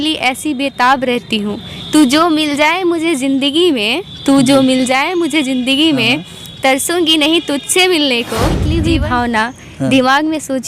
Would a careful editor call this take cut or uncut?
cut